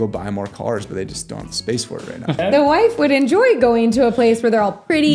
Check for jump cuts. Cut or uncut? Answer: cut